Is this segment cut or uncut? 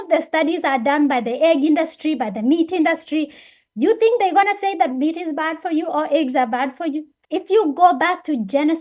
cut